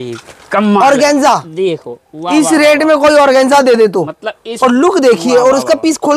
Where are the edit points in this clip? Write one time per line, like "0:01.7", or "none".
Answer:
0:04.5